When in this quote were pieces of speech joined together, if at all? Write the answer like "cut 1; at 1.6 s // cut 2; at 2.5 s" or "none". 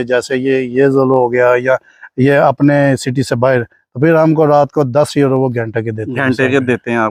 none